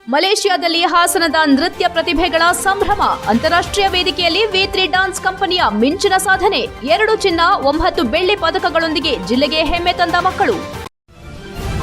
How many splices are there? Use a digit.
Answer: 1